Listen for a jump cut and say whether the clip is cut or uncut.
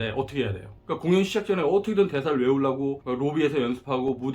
uncut